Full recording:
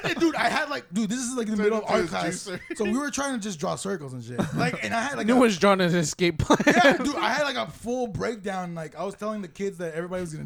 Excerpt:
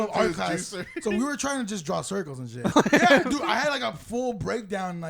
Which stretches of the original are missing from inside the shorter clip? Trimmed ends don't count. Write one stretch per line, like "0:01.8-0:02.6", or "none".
0:04.4-0:06.4